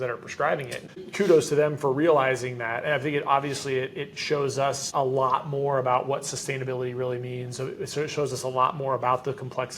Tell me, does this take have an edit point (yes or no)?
yes